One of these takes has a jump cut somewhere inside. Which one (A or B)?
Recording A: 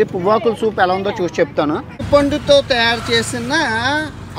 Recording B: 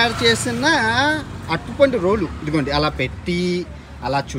A